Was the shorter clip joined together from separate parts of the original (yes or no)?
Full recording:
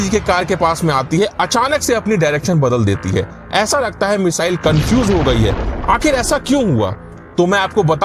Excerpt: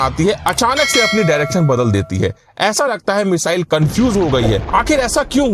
yes